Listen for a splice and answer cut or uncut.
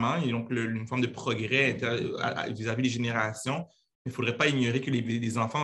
uncut